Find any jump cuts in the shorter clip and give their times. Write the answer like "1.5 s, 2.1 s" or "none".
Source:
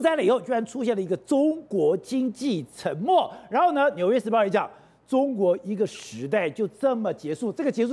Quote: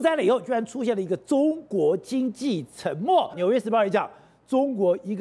3.4 s